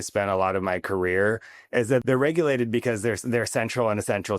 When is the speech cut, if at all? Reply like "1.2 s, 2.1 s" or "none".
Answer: 2.0 s